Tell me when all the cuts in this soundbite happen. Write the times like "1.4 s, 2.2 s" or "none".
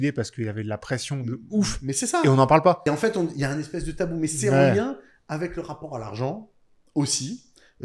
2.9 s

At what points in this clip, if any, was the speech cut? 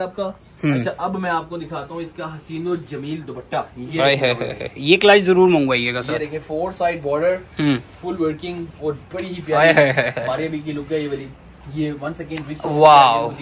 none

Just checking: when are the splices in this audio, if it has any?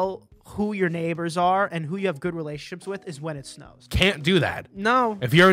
3.8 s

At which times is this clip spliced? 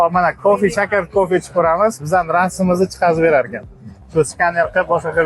1.1 s

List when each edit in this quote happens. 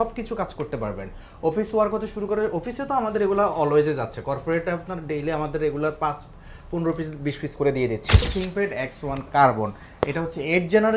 8.3 s

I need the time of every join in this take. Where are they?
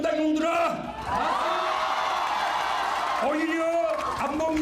1.0 s

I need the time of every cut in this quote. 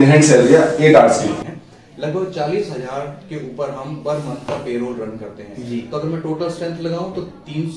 1.4 s

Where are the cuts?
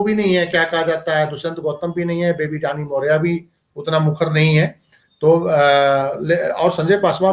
none

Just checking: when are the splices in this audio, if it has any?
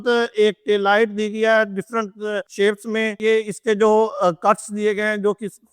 none

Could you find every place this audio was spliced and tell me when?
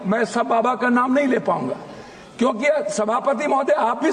none

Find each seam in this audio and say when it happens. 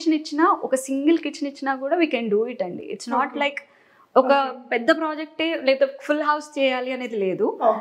none

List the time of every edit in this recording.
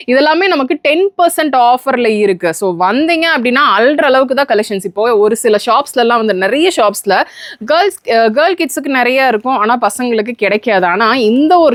none

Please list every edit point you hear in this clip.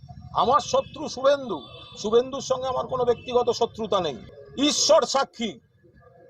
4.2 s

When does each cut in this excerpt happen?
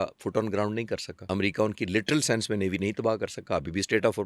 1.1 s

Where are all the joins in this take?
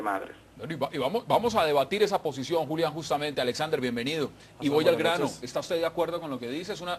none

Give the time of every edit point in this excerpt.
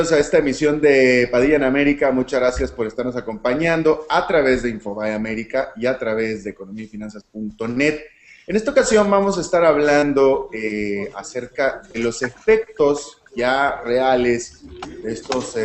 3.5 s

